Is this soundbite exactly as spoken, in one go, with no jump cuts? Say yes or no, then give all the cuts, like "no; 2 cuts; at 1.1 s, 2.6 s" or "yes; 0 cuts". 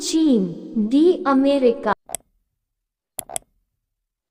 yes; 0 cuts